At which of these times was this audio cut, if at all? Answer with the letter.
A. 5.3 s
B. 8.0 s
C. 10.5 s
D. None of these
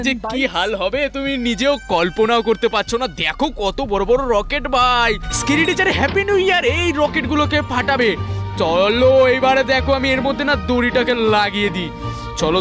A